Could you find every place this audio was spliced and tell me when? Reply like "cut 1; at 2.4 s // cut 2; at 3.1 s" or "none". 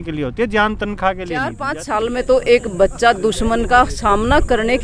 cut 1; at 1.7 s

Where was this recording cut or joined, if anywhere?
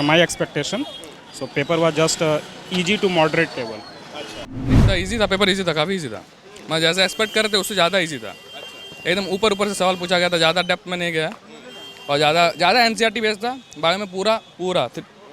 cut 1; at 4.8 s

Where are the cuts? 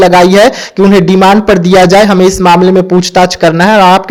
none

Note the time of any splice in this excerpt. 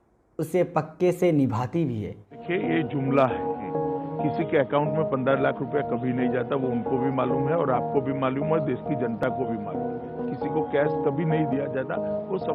cut 1; at 2.4 s

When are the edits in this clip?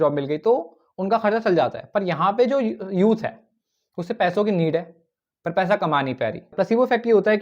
cut 1; at 6.5 s

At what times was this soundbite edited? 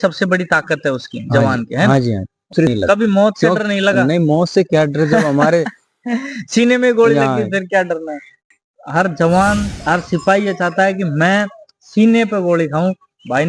cut 1; at 2.7 s // cut 2; at 8.4 s

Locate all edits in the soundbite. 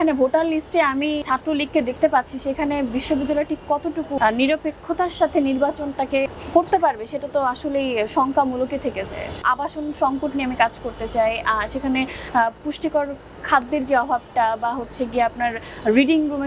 cut 1; at 1.2 s // cut 2; at 4.2 s // cut 3; at 6.3 s // cut 4; at 9.4 s

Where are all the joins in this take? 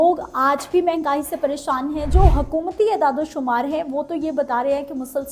cut 1; at 2.1 s

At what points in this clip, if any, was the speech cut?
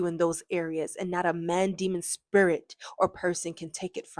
none

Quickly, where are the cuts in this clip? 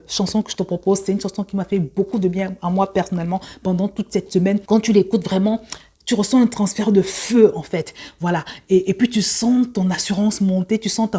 cut 1; at 4.6 s

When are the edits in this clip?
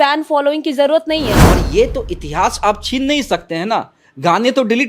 cut 1; at 1.4 s

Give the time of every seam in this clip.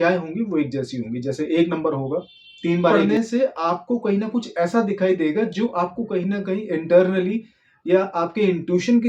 cut 1; at 3.0 s

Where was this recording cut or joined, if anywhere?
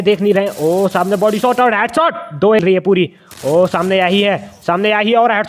cut 1; at 2.6 s

